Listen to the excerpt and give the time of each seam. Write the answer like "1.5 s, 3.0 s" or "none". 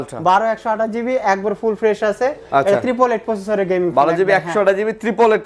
none